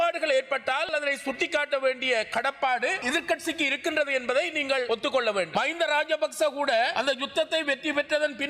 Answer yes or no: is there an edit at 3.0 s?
yes